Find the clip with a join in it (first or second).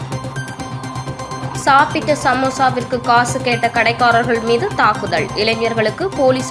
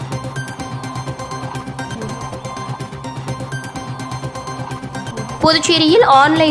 first